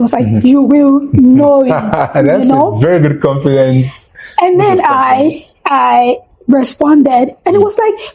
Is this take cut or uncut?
uncut